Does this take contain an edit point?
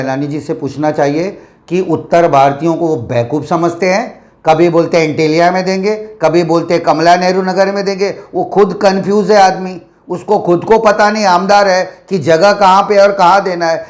no; 0 cuts

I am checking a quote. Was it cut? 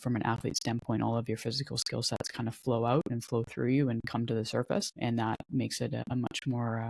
yes; 2 cuts; at 4.9 s, 6.0 s

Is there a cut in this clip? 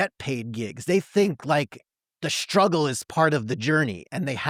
no; 0 cuts

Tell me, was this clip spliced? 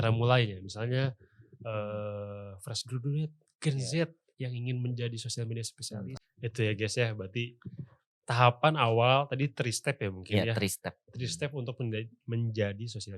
yes; 1 cut; at 6.2 s

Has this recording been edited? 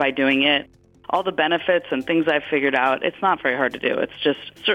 no; 0 cuts

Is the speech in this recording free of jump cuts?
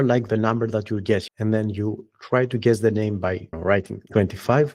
no; 2 cuts; at 1.3 s, 3.5 s

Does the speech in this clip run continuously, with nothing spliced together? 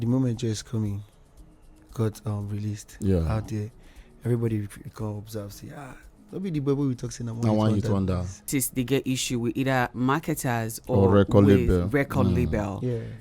no; 1 cut; at 8.5 s

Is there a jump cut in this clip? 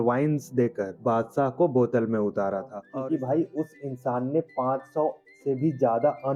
yes; 1 cut; at 2.8 s

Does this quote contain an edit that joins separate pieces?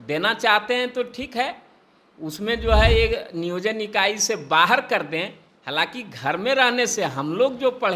no; 0 cuts

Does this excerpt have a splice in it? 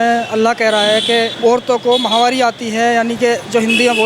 yes; 1 cut; at 1.3 s

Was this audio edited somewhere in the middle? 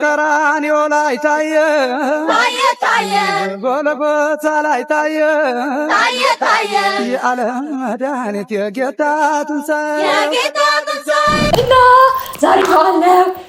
yes; 1 cut; at 11.5 s

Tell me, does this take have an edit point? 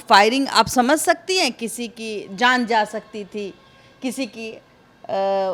no; 0 cuts

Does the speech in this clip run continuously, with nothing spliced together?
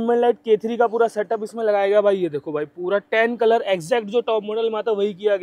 yes; 0 cuts

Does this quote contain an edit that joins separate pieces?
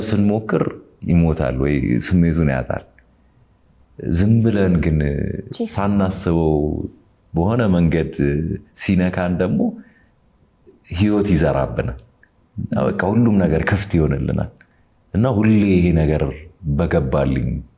no; 0 cuts

